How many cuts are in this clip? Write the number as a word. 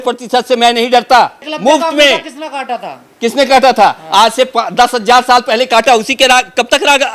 one